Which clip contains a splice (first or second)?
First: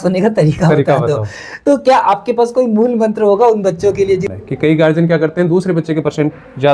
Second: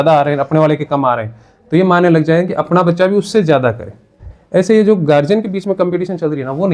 first